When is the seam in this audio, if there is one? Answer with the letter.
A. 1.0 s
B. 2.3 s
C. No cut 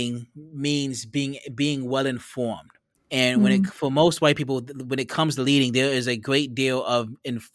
C